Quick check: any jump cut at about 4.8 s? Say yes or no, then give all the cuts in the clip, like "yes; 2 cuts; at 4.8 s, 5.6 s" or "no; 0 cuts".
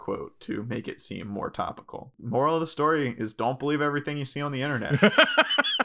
yes; 2 cuts; at 2.1 s, 4.8 s